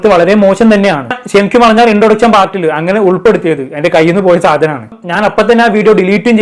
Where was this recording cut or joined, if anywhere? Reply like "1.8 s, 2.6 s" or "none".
none